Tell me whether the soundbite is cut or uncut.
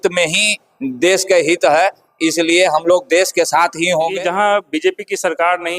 cut